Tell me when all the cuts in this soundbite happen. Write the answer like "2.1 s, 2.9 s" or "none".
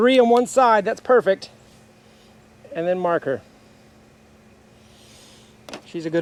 none